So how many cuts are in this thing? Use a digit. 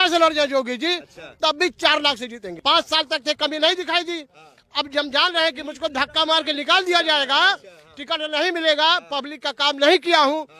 1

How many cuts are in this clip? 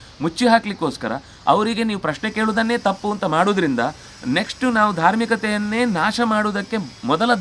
0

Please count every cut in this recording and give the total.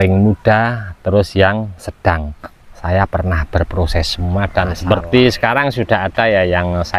1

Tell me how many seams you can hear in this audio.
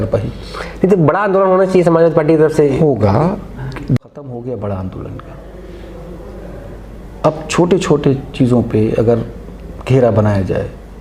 1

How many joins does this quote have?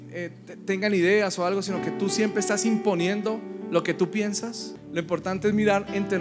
1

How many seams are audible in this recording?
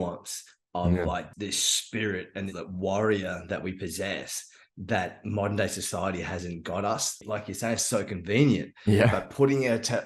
3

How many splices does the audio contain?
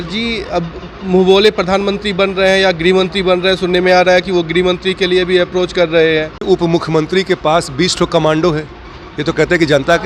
1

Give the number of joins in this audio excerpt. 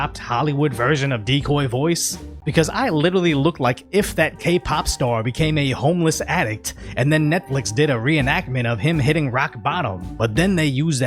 1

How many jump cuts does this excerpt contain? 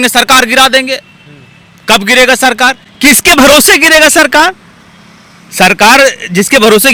0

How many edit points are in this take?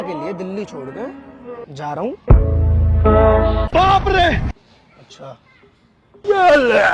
1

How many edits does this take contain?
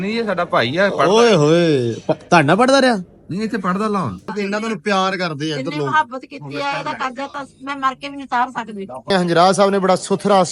2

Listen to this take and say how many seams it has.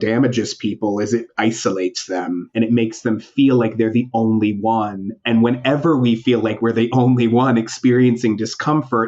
1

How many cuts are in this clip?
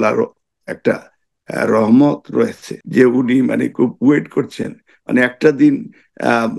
1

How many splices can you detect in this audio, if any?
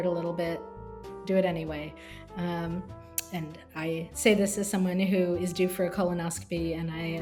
0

